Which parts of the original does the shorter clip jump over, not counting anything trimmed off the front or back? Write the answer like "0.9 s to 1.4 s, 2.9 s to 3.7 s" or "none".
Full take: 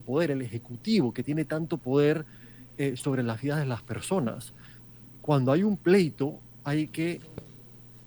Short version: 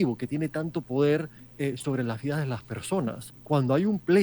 2.4 s to 2.6 s, 4.5 s to 5.1 s